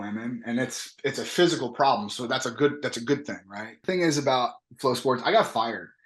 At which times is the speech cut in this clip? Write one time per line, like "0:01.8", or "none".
0:03.7